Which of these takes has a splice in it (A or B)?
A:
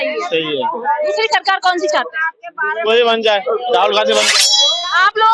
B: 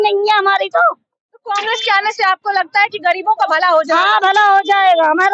A